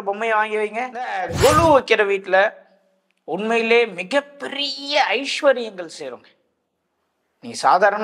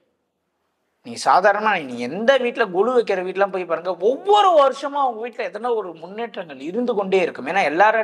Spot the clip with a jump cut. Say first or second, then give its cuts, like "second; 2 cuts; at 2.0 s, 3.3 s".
first; 1 cut; at 1.2 s